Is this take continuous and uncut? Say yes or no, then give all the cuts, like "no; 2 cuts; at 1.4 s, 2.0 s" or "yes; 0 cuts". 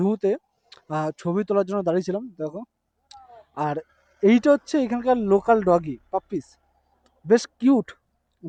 yes; 0 cuts